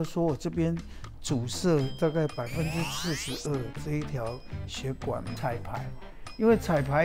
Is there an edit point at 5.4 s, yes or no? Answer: yes